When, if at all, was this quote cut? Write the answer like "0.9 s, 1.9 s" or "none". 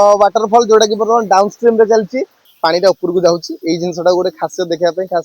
2.4 s